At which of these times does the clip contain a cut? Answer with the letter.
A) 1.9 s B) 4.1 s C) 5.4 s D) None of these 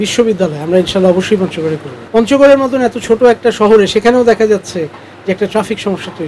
A